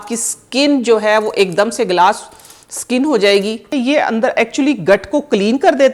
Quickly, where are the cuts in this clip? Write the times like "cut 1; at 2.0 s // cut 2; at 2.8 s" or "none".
cut 1; at 3.7 s